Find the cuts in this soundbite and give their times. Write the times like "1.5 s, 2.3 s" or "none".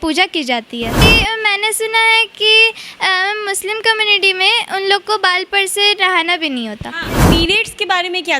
1.0 s, 7.2 s